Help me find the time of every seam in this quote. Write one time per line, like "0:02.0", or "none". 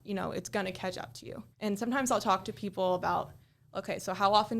0:01.5